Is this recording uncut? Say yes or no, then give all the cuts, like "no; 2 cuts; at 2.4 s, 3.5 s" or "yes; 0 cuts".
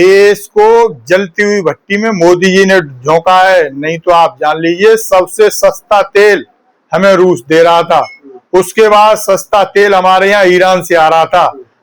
yes; 0 cuts